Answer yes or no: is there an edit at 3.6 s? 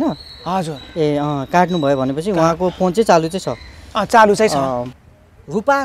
no